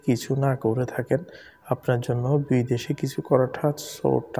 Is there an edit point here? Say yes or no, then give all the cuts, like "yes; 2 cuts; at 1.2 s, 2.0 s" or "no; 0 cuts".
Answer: no; 0 cuts